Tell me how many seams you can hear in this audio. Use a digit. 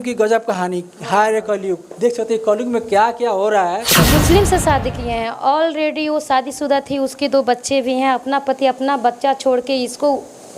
1